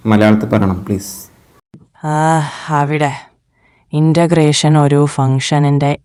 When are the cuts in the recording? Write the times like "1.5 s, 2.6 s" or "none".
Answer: none

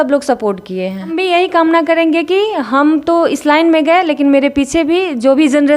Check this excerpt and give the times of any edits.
1.1 s

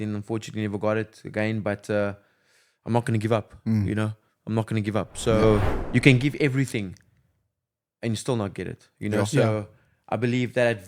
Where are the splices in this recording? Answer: 5.8 s

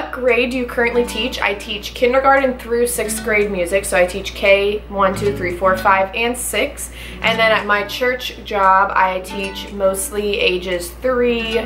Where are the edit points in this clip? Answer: none

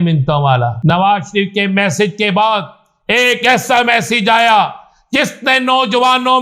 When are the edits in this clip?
0.9 s

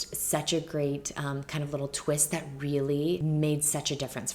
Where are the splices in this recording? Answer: 3.2 s

